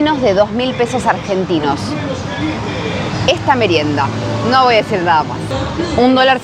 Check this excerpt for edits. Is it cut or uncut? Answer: uncut